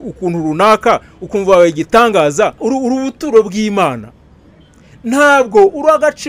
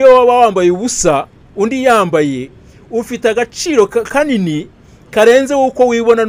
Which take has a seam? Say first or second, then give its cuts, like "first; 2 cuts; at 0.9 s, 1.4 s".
first; 1 cut; at 2.6 s